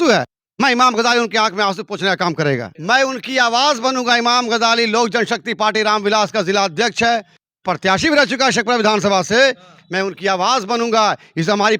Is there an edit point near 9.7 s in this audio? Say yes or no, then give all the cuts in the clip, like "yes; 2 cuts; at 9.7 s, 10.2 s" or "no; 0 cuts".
no; 1 cut; at 2.7 s